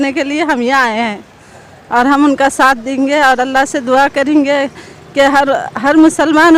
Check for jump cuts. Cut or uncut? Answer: uncut